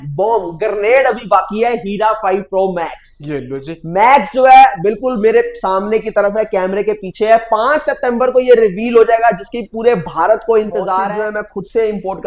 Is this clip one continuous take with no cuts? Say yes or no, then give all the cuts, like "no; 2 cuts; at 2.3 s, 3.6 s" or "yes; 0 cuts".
no; 1 cut; at 11.1 s